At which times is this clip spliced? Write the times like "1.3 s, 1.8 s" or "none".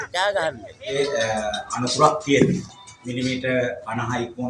1.0 s